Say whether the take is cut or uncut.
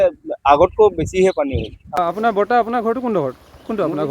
cut